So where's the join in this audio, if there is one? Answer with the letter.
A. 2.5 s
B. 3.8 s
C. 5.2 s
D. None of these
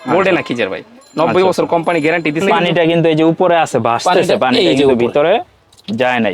A